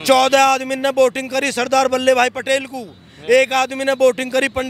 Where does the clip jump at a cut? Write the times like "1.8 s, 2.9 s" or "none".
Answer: none